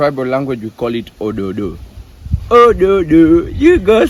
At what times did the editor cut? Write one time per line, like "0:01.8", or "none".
none

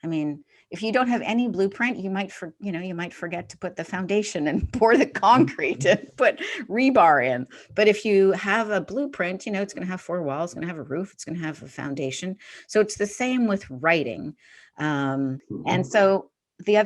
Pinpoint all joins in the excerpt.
0:15.5

